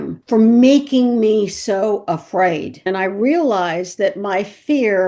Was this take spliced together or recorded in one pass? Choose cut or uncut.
cut